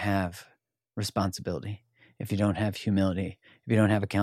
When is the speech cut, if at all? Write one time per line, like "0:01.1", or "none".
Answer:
none